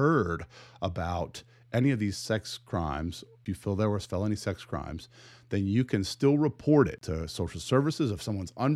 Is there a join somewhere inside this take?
yes; 2 cuts; at 3.3 s, 7.0 s

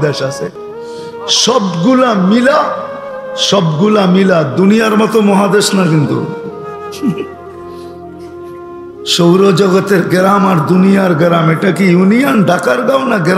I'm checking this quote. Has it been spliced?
no; 0 cuts

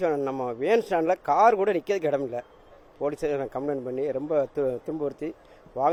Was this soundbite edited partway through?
no; 0 cuts

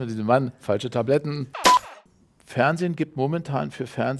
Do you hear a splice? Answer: yes; 1 cut; at 2.0 s

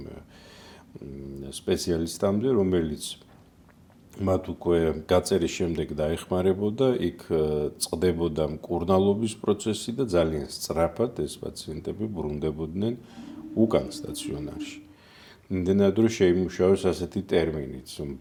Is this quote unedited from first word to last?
yes; 0 cuts

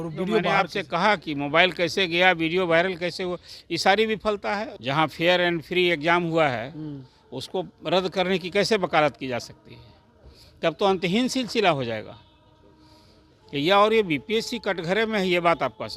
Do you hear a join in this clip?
yes; 1 cut; at 4.7 s

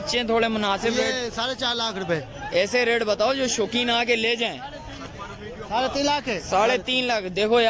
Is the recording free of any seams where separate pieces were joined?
yes; 0 cuts

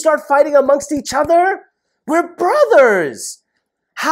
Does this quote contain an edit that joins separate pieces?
no; 0 cuts

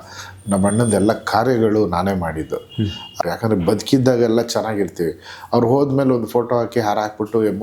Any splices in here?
yes; 1 cut; at 3.1 s

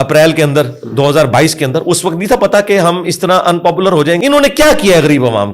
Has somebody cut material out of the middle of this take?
yes; 1 cut; at 4.2 s

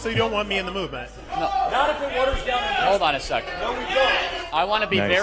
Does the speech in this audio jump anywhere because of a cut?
no; 0 cuts

